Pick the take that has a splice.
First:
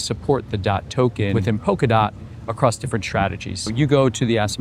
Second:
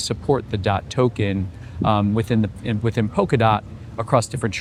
first; 2 cuts; at 1.4 s, 3.7 s

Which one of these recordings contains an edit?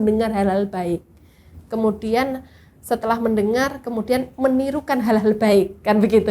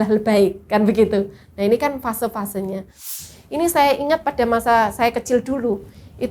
second; 1 cut; at 3.0 s

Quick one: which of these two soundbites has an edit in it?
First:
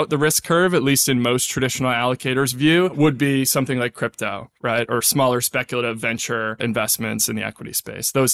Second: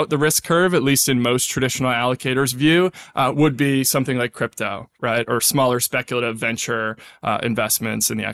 first; 2 cuts; at 2.9 s, 6.6 s

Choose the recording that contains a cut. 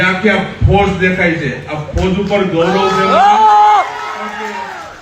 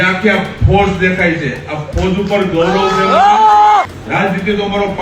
second; 1 cut; at 4.0 s

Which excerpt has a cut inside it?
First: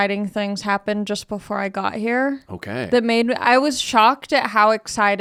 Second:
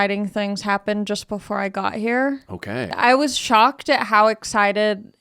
second; 1 cut; at 2.9 s

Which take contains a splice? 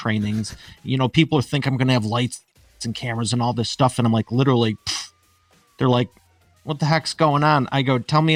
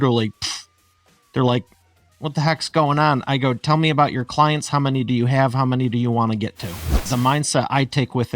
second; 1 cut; at 7.1 s

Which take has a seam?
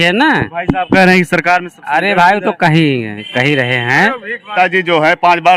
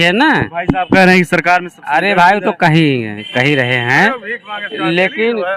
first; 1 cut; at 4.5 s

